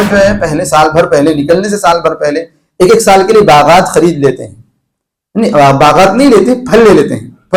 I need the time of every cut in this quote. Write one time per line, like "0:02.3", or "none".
none